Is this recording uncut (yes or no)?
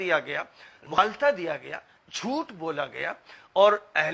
no